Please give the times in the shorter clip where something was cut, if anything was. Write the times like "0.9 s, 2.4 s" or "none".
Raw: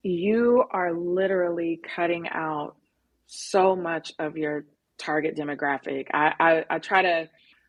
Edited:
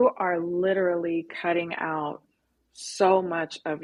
none

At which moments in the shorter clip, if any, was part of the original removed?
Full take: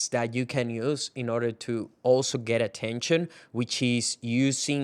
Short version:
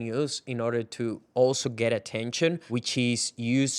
2.6 s

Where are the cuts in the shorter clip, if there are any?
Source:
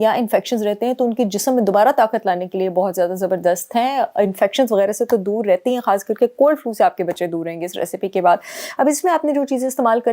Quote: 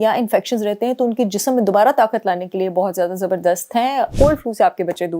4.1 s

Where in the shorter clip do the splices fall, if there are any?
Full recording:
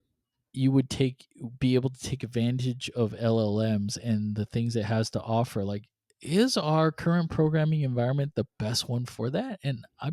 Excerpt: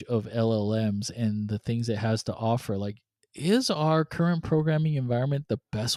none

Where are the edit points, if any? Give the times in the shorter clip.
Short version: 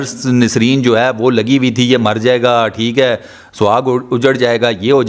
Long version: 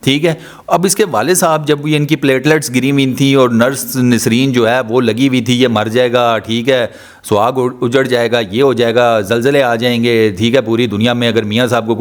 none

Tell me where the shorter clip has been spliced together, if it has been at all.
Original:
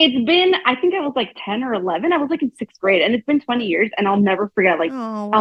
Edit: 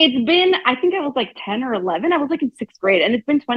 none

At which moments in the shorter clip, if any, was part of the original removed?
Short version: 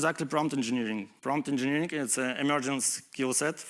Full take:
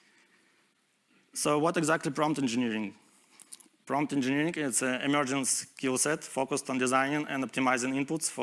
1.1 s

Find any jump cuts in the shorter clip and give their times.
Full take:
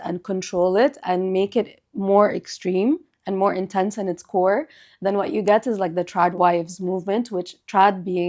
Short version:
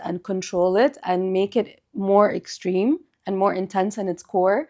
none

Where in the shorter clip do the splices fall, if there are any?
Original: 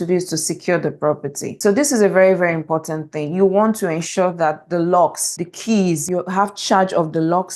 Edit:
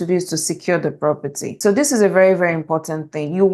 none

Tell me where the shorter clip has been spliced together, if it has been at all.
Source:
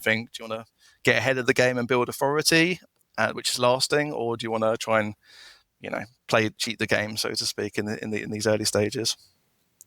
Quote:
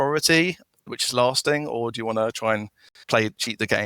0.9 s, 2.9 s

